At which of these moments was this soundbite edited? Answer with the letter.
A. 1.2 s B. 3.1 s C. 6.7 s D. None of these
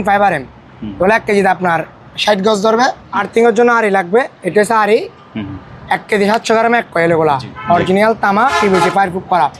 B